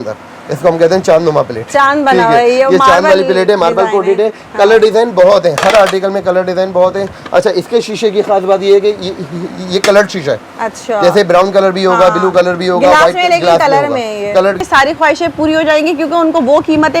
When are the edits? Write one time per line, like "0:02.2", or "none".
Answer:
0:14.9